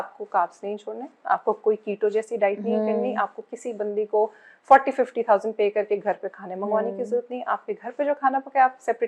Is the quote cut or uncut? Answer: uncut